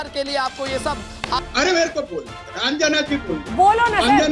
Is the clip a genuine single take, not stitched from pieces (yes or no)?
no